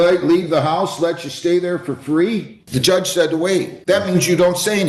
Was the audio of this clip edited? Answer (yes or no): yes